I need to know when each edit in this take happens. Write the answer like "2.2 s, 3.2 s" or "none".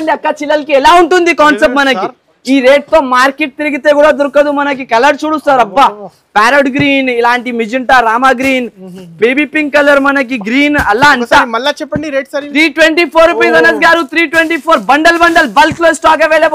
none